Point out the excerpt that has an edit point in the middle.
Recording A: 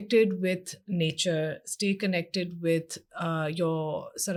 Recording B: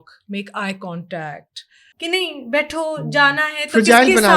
B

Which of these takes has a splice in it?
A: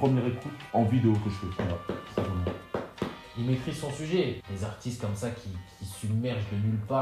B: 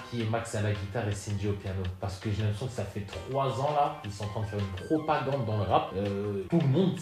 A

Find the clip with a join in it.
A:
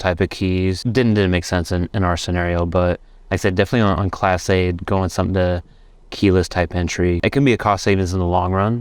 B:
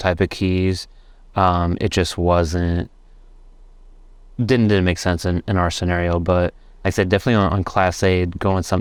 A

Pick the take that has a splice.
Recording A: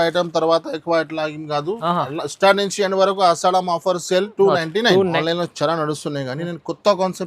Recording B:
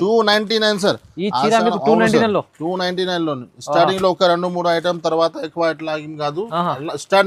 A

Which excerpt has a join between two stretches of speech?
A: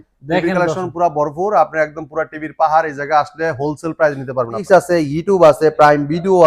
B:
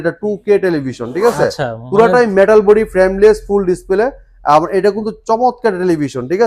A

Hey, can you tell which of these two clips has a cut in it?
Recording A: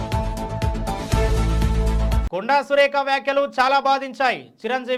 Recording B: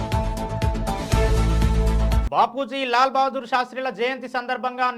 B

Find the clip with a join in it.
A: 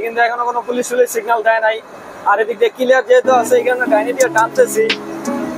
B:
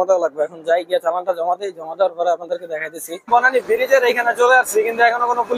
B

